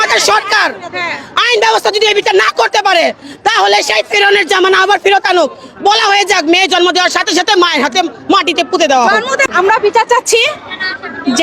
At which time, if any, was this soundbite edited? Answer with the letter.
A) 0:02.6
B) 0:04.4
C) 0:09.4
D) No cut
C